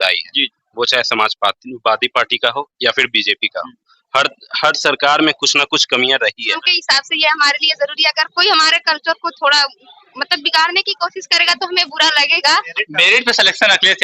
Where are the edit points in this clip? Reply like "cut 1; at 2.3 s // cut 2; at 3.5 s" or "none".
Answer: cut 1; at 6.7 s // cut 2; at 12.7 s